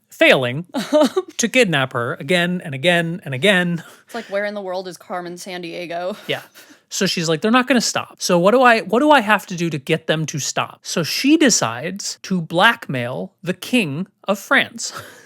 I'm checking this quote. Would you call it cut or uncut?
cut